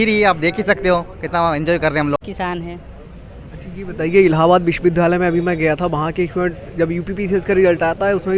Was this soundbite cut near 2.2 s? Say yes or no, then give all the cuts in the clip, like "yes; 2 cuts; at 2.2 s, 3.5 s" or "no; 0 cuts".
yes; 1 cut; at 2.2 s